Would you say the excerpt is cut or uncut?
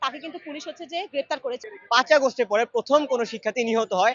cut